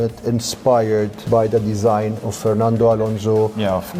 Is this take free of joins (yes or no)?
yes